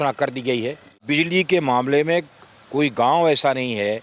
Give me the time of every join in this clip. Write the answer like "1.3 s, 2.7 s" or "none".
0.9 s

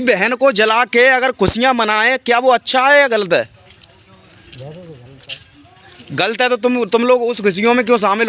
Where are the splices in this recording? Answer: none

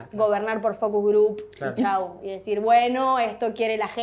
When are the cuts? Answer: none

